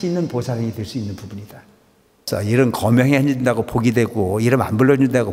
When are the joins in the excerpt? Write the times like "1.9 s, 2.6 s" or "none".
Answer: 2.2 s

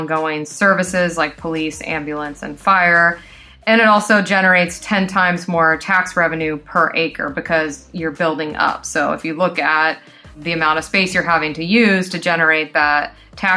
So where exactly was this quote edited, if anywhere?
10.4 s

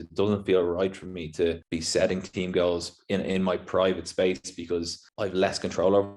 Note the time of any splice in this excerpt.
1.7 s, 5.0 s

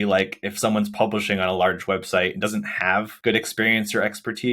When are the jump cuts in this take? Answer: 3.1 s

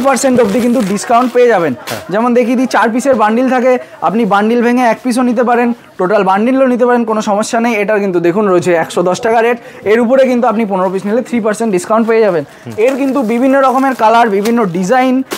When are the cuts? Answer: none

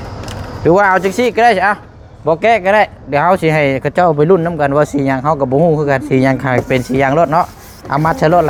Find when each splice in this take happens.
none

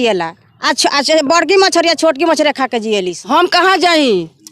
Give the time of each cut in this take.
3.2 s

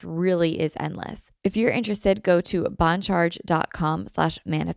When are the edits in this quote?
1.2 s

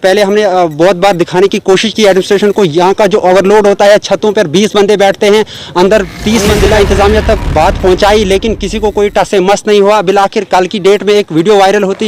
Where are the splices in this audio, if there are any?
6.4 s

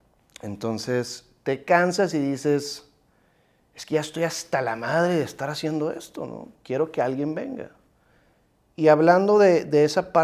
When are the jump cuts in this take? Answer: none

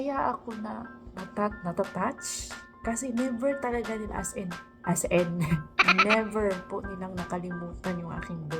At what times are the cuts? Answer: none

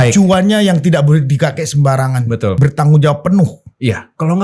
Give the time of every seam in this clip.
2.6 s

